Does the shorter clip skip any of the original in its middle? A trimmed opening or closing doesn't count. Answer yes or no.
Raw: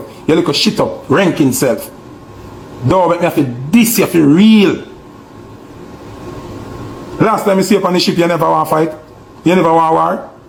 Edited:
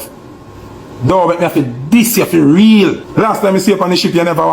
yes